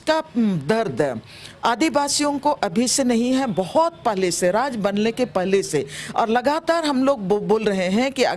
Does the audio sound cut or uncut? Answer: uncut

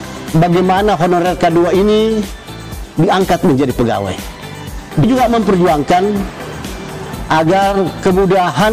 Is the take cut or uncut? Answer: cut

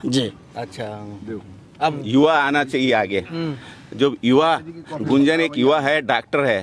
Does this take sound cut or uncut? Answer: cut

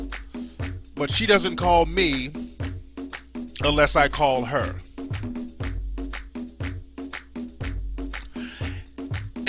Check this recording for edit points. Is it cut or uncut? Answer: cut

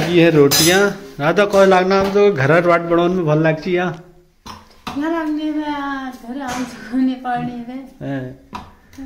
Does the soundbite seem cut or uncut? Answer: uncut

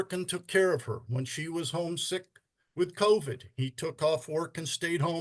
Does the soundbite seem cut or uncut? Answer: uncut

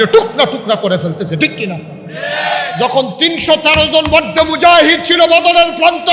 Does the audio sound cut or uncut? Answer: cut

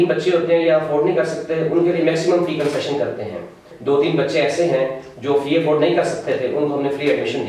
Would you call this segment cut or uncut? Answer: cut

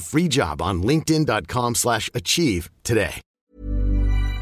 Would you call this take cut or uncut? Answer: cut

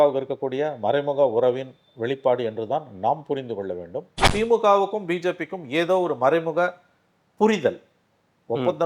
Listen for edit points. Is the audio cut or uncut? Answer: cut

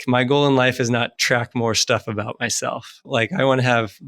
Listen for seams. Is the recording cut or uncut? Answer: cut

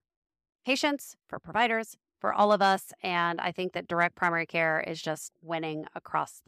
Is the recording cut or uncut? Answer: cut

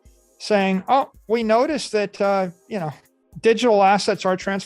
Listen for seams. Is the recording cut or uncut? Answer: uncut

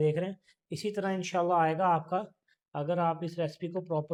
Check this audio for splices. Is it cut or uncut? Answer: uncut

